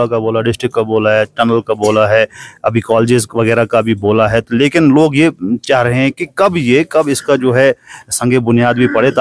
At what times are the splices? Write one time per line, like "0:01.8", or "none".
none